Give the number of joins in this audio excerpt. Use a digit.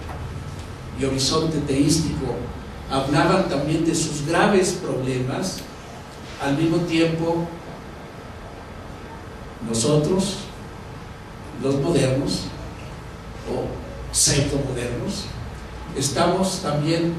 1